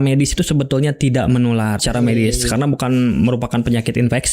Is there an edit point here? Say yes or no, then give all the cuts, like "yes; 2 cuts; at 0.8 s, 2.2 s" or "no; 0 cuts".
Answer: yes; 1 cut; at 1.8 s